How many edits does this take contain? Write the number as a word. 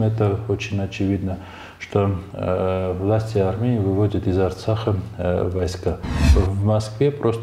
one